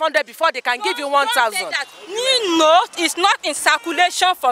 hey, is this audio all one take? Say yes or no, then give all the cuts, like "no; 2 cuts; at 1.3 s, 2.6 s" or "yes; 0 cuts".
yes; 0 cuts